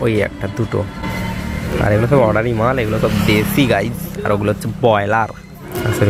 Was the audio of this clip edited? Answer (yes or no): no